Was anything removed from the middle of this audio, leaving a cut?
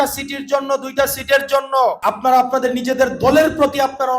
yes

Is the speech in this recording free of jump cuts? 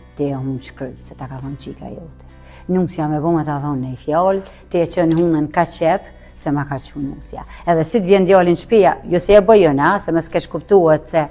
yes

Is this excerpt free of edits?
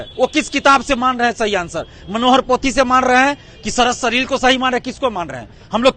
yes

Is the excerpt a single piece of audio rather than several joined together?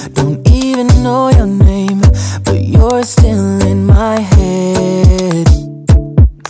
yes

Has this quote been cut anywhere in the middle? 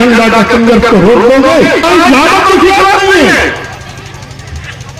yes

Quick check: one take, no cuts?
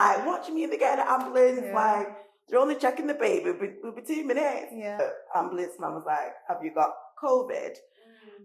no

